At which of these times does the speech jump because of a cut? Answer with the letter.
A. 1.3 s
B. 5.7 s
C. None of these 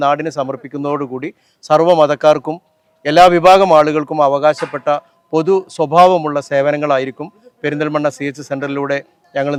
C